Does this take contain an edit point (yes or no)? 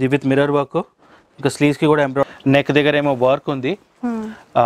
yes